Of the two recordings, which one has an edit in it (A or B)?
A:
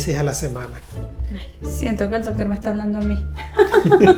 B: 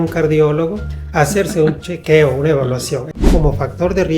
B